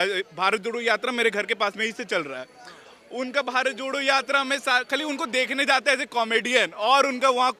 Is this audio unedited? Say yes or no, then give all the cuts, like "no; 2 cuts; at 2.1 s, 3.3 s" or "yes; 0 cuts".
yes; 0 cuts